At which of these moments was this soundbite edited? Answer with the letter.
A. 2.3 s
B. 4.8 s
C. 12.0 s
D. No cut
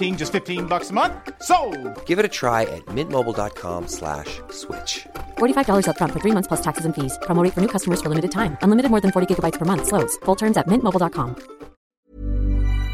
C